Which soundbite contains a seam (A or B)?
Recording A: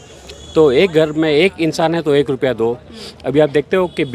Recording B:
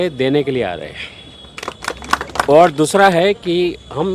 B